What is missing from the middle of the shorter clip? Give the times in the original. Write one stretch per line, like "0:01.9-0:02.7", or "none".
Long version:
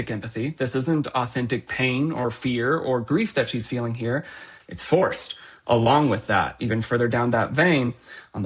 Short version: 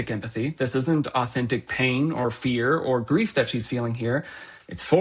none